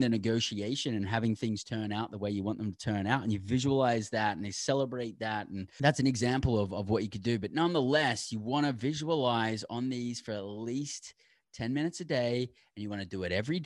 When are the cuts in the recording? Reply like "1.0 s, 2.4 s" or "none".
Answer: 5.6 s